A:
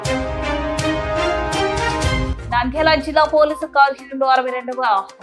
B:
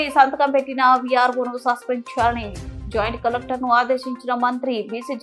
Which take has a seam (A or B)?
A